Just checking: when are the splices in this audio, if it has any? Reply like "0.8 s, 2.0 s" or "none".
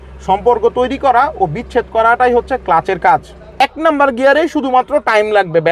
3.7 s